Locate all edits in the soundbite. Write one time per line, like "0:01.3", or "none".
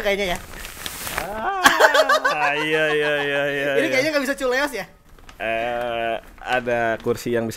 none